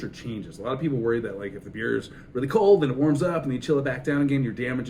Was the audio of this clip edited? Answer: no; 0 cuts

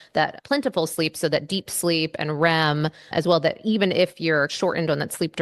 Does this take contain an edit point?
yes; 1 cut; at 4.5 s

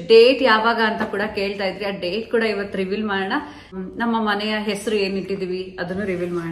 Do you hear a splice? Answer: yes; 1 cut; at 3.7 s

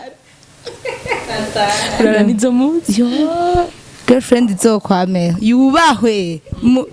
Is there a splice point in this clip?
no; 0 cuts

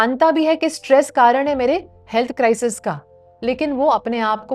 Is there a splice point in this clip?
no; 0 cuts

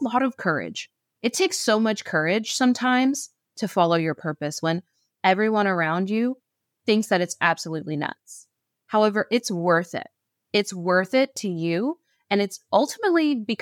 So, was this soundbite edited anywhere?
no; 0 cuts

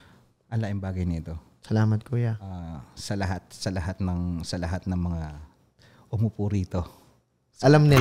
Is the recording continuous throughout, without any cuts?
yes; 0 cuts

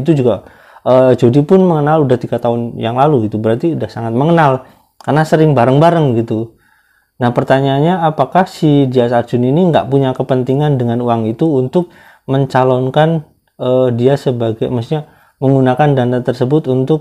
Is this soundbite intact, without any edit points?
yes; 0 cuts

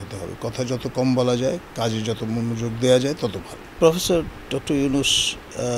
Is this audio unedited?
no; 1 cut; at 3.7 s

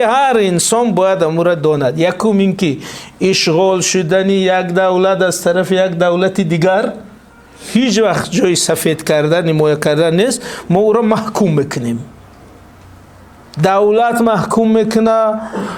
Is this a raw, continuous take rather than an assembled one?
yes; 0 cuts

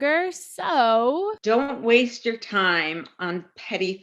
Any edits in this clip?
yes; 1 cut; at 1.4 s

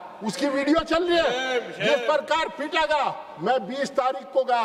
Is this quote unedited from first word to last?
yes; 0 cuts

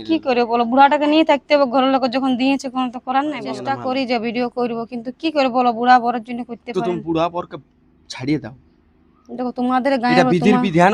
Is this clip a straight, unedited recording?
no; 1 cut; at 3.7 s

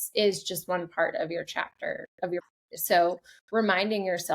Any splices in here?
yes; 1 cut; at 2.4 s

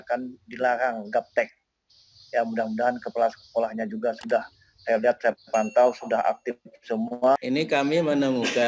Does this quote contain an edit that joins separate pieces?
yes; 1 cut; at 7.4 s

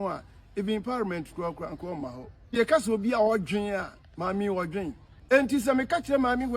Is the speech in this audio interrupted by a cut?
yes; 2 cuts; at 2.6 s, 5.1 s

